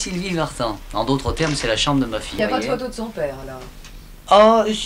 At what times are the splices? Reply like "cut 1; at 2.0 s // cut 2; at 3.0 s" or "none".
cut 1; at 2.4 s